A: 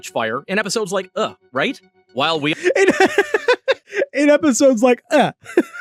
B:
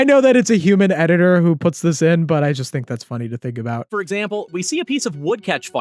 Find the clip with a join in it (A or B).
B